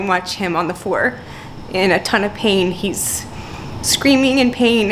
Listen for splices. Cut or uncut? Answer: uncut